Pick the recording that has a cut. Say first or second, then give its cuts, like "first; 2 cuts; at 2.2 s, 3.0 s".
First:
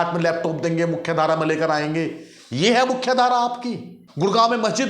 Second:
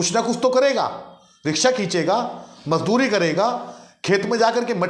first; 1 cut; at 4.0 s